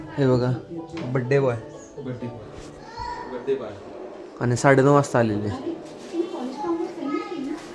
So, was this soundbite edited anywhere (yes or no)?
no